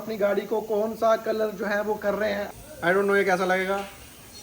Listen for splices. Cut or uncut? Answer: cut